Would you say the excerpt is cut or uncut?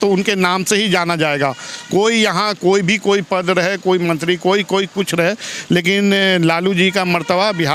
uncut